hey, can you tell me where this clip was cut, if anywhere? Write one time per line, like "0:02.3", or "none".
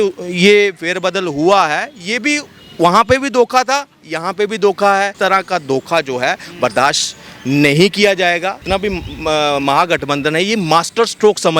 0:05.1
0:08.6

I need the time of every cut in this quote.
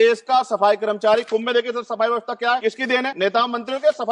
0:02.9

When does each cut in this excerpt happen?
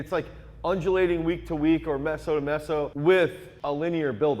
0:02.9
0:03.5

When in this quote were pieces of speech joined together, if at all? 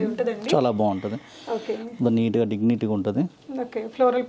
none

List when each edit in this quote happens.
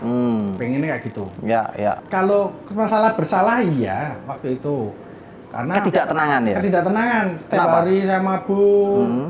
0:02.0

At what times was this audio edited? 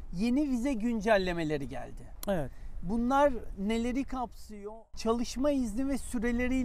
0:04.7

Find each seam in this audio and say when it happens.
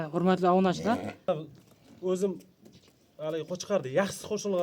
0:01.3

